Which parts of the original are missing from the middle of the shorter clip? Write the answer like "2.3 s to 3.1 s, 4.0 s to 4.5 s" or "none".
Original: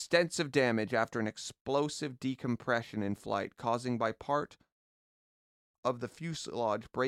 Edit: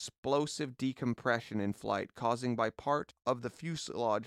4.5 s to 5.7 s